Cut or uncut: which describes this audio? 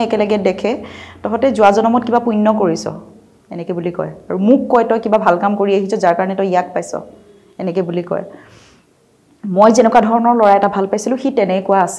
uncut